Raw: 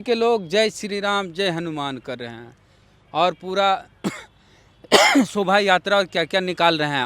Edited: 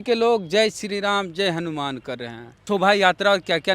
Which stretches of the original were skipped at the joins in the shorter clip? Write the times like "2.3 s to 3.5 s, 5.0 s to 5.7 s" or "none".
2.6 s to 5.3 s